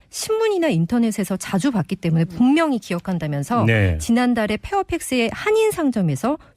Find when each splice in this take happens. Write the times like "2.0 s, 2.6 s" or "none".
1.3 s